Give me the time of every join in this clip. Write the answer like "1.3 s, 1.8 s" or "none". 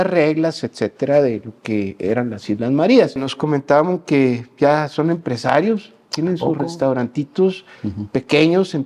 3.3 s